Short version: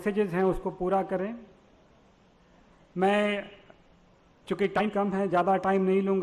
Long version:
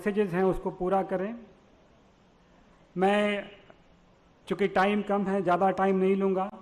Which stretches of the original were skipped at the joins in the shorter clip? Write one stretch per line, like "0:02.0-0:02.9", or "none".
0:04.8-0:04.9